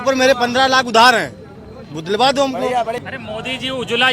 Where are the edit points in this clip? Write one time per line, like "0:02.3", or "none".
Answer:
0:02.9